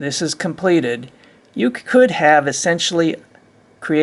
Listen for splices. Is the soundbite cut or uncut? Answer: uncut